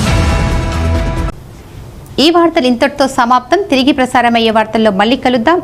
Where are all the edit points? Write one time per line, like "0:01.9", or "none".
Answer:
none

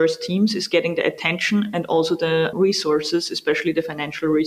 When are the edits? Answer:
0:02.5

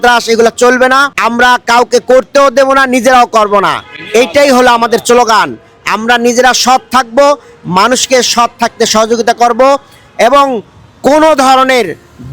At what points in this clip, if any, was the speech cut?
0:01.1

